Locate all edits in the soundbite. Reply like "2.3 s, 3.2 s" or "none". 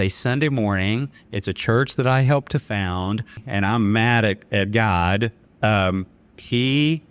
3.4 s

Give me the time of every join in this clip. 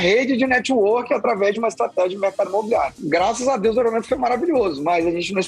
3.0 s

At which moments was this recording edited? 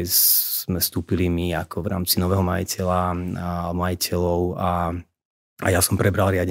none

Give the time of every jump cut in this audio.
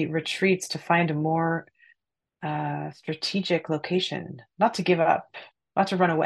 none

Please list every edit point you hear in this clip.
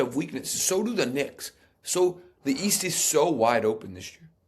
none

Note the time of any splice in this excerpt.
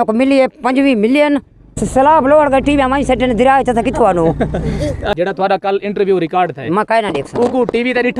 1.8 s, 5.1 s

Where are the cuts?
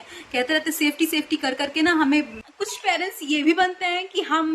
2.4 s

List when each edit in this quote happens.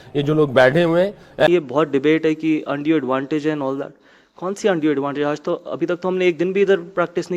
1.5 s

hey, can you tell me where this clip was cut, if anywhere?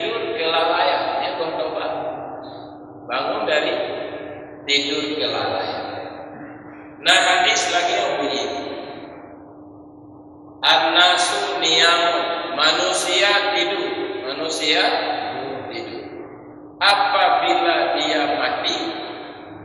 none

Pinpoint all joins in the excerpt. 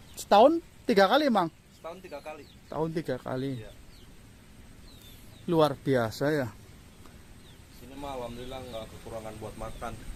none

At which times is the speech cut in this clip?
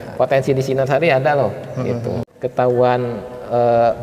2.3 s

